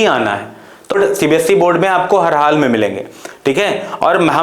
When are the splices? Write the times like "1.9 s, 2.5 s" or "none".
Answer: 1.0 s